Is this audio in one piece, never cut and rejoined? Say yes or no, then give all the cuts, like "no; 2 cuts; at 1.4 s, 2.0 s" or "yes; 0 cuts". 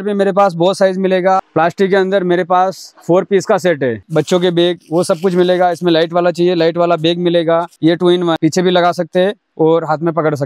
no; 3 cuts; at 1.4 s, 4.0 s, 7.7 s